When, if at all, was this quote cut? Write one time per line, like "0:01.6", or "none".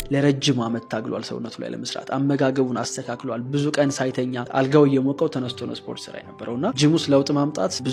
none